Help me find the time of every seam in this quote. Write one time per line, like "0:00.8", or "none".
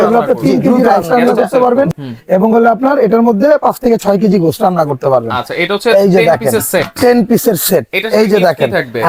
none